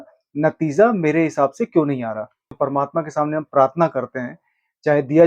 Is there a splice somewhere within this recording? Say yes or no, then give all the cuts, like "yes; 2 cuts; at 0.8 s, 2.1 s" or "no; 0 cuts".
yes; 1 cut; at 2.6 s